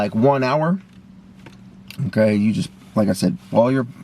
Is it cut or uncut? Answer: uncut